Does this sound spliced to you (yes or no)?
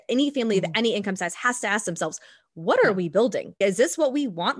yes